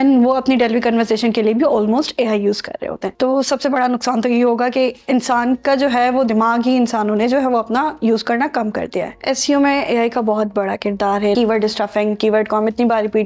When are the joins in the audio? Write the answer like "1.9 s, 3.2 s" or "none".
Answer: 3.0 s, 9.1 s, 11.4 s